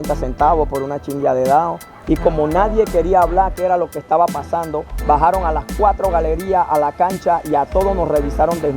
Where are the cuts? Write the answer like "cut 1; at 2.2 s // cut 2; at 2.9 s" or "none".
cut 1; at 1.9 s

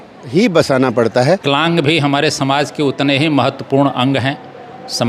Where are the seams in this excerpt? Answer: cut 1; at 1.4 s

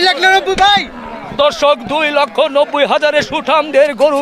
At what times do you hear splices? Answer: none

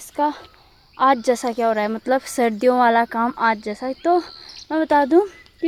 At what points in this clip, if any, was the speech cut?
none

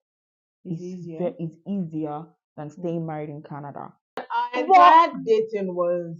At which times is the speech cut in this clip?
cut 1; at 4.4 s

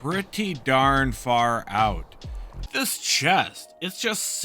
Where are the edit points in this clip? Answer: cut 1; at 2.7 s

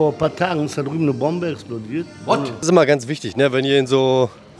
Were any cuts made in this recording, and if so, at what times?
cut 1; at 2.6 s

